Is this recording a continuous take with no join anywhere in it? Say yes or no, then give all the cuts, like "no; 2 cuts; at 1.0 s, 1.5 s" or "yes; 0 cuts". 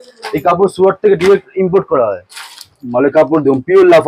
no; 1 cut; at 2.7 s